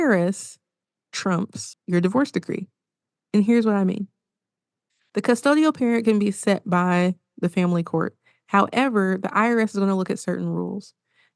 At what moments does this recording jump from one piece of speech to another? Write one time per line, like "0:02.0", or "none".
0:01.7